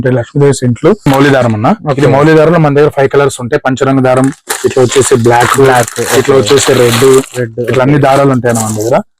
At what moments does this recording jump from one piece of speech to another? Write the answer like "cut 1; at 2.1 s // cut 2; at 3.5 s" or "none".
cut 1; at 1.0 s